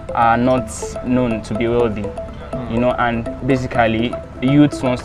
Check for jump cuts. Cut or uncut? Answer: uncut